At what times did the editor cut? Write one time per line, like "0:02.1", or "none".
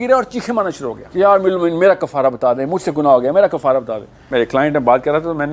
0:00.9
0:04.2

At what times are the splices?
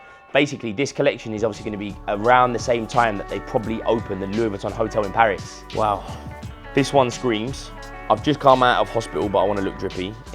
0:05.6

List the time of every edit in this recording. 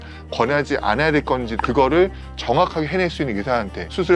0:01.5

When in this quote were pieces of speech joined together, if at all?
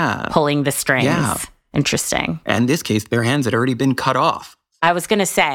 0:01.9

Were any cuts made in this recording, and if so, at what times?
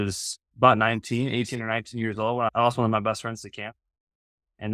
none

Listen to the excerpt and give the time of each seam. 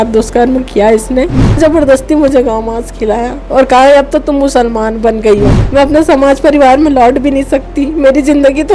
0:01.6
0:05.6

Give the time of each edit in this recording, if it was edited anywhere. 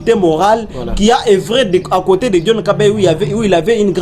none

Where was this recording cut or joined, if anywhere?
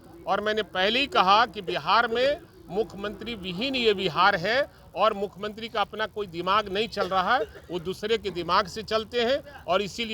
none

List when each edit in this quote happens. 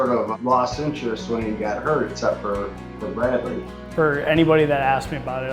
0:03.8

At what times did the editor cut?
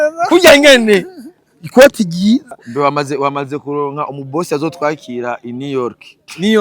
0:02.5

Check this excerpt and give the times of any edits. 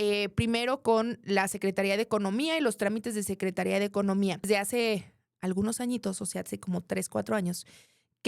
0:04.5

